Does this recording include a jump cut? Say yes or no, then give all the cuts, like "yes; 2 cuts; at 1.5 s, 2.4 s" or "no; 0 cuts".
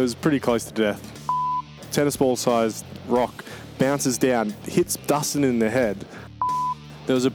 yes; 2 cuts; at 1.4 s, 6.5 s